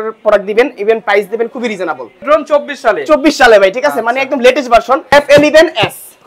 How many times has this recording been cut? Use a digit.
2